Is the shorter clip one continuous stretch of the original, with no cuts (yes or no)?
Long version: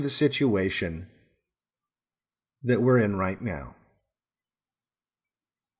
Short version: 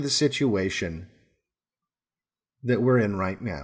yes